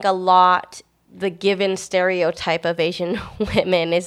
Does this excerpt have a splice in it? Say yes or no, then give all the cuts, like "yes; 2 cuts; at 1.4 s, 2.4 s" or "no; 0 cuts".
yes; 1 cut; at 0.9 s